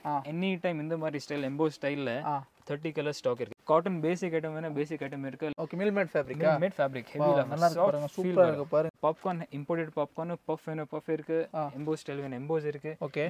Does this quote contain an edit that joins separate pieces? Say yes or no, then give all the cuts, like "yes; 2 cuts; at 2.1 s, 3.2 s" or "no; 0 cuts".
yes; 3 cuts; at 3.5 s, 5.5 s, 8.9 s